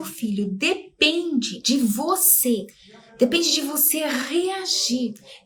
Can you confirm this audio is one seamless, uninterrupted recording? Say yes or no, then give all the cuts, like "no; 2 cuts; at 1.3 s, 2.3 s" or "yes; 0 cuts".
yes; 0 cuts